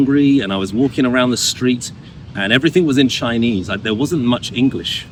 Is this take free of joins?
yes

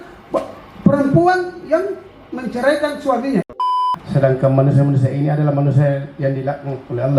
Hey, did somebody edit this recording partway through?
yes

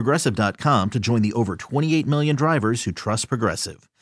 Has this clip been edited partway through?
no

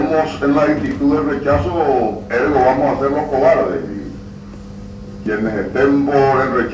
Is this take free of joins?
yes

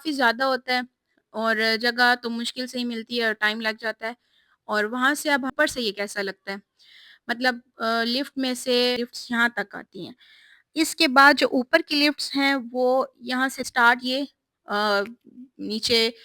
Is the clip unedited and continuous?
no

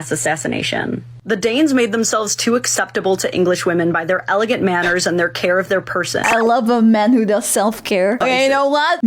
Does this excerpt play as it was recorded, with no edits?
no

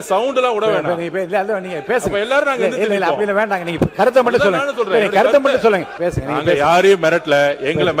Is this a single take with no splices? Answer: no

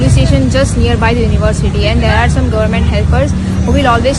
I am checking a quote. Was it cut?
no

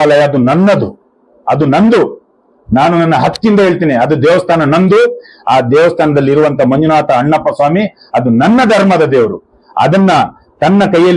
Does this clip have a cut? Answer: no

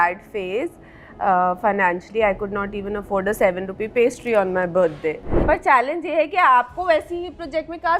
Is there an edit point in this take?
yes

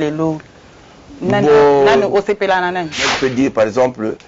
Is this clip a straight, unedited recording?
no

